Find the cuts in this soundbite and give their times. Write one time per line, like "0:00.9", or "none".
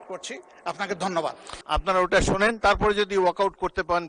0:01.5